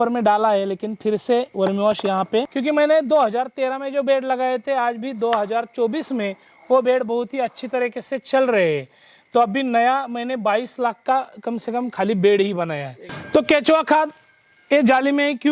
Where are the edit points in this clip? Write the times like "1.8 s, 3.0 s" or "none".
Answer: 2.5 s